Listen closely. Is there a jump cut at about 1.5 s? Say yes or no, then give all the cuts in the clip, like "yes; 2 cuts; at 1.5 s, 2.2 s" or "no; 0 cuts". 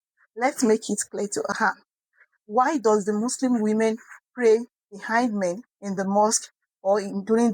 yes; 1 cut; at 1.5 s